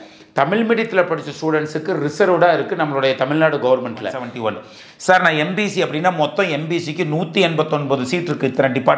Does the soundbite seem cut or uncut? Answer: cut